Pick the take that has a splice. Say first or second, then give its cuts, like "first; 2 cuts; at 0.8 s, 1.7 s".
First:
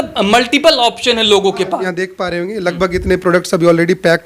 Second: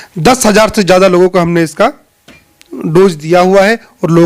first; 1 cut; at 1.9 s